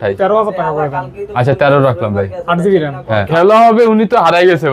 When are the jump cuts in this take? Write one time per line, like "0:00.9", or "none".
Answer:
0:03.3